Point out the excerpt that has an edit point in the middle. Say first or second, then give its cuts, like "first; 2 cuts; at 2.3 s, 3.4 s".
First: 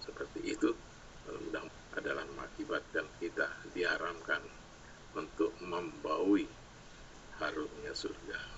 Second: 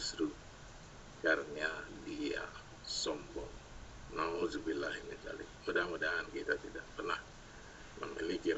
first; 1 cut; at 1.7 s